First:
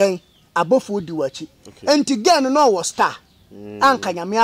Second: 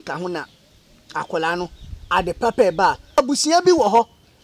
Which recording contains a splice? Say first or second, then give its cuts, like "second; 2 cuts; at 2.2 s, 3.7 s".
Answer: second; 1 cut; at 3.2 s